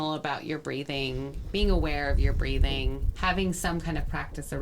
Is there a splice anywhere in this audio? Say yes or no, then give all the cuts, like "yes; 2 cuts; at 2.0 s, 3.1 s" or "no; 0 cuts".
yes; 1 cut; at 3.1 s